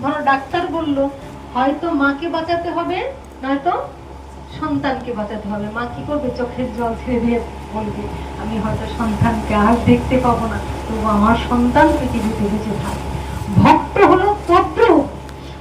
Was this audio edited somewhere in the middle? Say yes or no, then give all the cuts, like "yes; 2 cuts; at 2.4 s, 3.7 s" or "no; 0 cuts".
yes; 1 cut; at 1.3 s